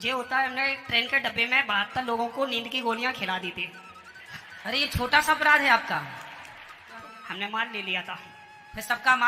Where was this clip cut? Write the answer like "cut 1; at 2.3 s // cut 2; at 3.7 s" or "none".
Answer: cut 1; at 7.0 s